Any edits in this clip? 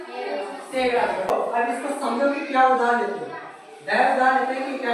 yes; 1 cut; at 1.3 s

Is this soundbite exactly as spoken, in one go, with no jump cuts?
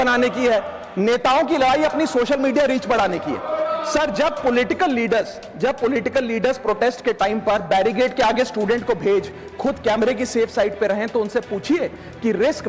yes; 0 cuts

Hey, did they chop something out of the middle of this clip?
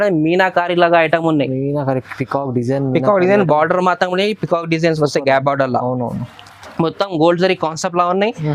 no; 0 cuts

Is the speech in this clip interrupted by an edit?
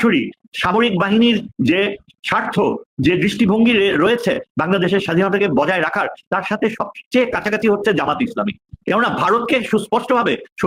no; 0 cuts

